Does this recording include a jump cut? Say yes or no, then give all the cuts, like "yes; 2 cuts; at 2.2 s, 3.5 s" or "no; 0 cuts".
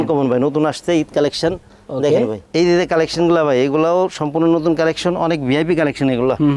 yes; 1 cut; at 2.5 s